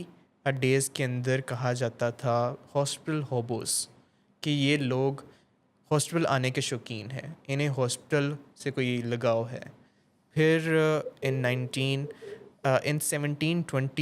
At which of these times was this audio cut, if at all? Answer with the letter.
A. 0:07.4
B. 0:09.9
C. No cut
C